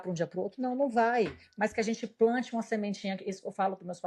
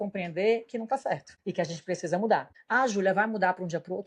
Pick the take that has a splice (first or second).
second